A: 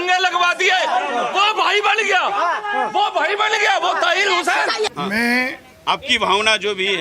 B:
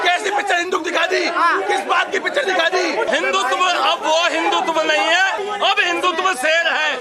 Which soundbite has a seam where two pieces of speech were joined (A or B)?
A